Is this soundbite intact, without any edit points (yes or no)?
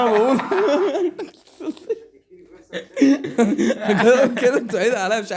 yes